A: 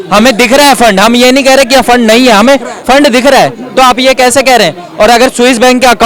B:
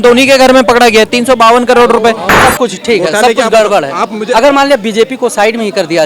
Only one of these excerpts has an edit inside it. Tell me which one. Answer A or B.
B